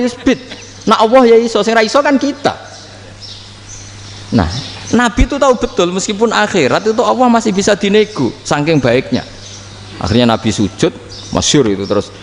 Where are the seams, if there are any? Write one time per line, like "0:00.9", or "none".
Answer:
none